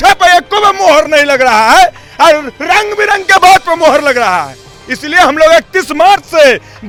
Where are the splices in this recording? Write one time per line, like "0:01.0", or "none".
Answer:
none